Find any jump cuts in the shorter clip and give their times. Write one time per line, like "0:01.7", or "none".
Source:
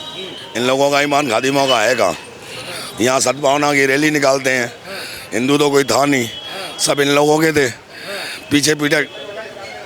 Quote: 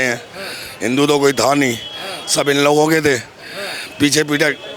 none